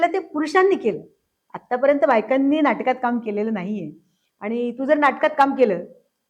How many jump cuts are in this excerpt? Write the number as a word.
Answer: zero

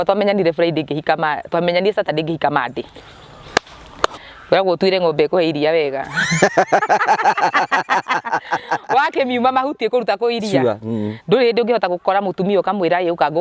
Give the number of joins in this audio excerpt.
one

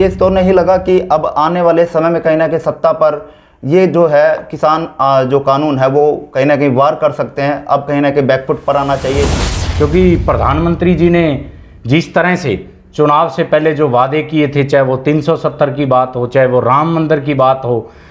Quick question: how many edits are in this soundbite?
one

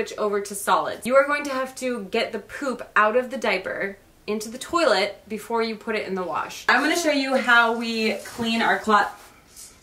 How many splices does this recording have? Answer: two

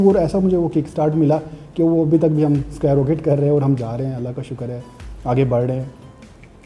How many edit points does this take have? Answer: zero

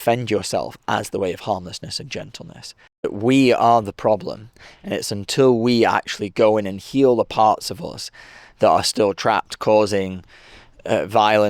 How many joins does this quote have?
one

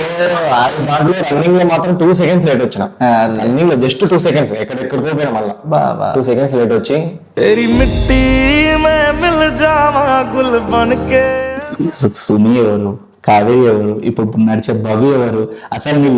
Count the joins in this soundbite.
one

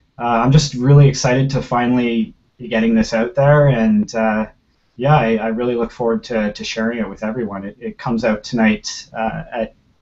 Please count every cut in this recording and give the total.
one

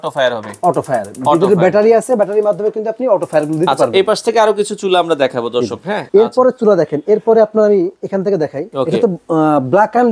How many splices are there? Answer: zero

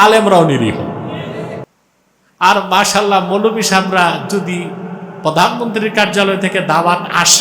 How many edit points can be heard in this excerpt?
one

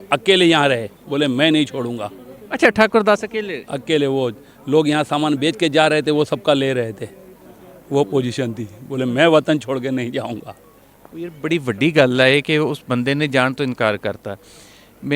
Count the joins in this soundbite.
zero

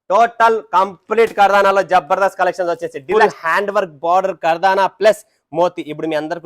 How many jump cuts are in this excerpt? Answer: one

